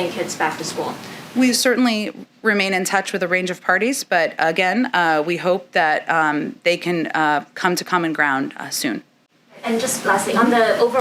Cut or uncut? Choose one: uncut